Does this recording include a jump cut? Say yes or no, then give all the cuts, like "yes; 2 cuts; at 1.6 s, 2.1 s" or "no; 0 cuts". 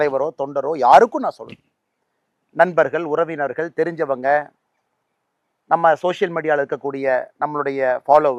no; 0 cuts